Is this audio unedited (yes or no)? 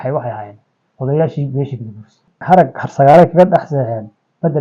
no